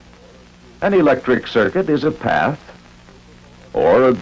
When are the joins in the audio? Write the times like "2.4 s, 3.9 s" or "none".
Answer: 2.1 s